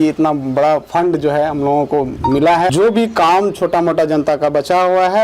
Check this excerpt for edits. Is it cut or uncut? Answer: cut